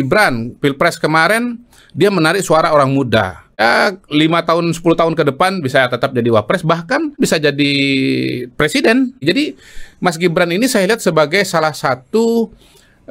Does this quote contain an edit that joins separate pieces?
yes; 3 cuts; at 3.6 s, 7.2 s, 9.2 s

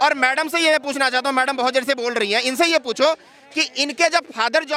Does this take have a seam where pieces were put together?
no; 0 cuts

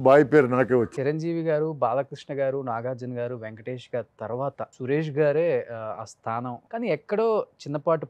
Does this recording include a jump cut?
yes; 3 cuts; at 0.9 s, 4.7 s, 6.6 s

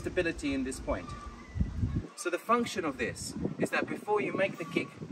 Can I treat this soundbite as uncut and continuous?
yes; 0 cuts

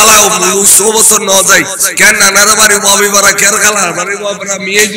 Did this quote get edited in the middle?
no; 0 cuts

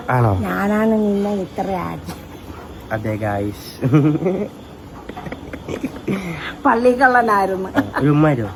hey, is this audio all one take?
yes; 0 cuts

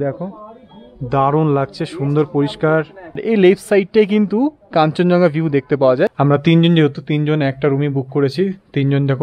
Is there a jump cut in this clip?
yes; 2 cuts; at 3.2 s, 6.2 s

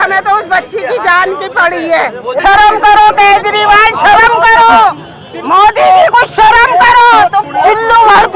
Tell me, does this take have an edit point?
yes; 2 cuts; at 2.4 s, 7.4 s

